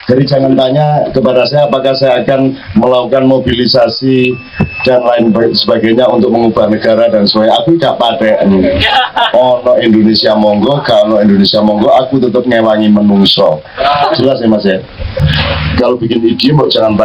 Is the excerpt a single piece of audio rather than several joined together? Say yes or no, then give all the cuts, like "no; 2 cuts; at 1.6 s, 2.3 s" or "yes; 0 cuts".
no; 1 cut; at 15.4 s